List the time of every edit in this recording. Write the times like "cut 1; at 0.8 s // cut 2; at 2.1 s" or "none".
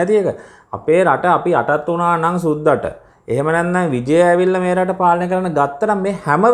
none